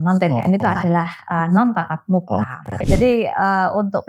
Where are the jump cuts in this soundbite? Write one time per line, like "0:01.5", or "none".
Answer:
0:02.8